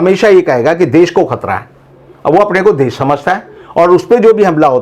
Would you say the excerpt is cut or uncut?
uncut